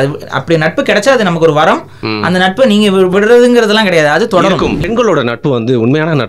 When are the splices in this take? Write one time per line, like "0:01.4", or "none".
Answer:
0:03.1
0:04.8